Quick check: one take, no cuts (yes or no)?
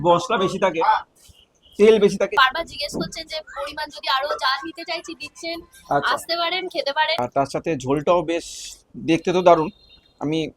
no